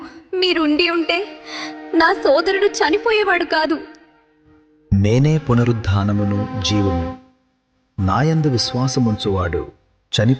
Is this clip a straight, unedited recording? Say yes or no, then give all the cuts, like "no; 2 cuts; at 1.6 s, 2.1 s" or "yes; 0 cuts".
yes; 0 cuts